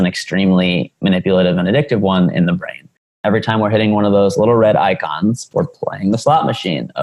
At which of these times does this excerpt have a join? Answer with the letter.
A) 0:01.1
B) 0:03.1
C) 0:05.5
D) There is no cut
B